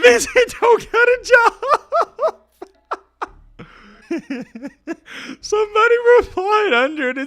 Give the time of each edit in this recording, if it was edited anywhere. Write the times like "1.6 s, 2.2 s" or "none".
3.9 s